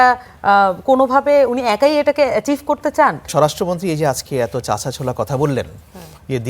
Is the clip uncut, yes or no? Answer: no